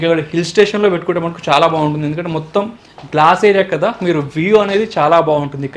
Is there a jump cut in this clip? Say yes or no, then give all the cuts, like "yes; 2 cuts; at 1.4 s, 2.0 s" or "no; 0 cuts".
no; 0 cuts